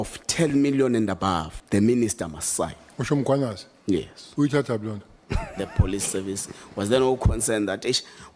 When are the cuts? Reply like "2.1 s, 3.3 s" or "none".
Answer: 1.6 s, 2.9 s, 5.6 s